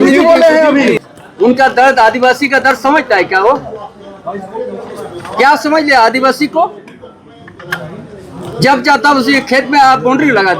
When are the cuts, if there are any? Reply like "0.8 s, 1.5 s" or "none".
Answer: 1.0 s